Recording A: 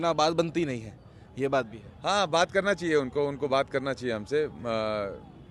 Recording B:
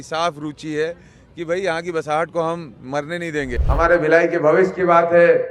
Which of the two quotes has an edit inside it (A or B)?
B